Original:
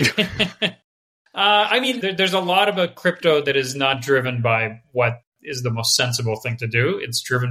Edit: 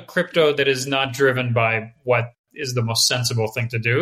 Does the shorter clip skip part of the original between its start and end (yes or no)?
no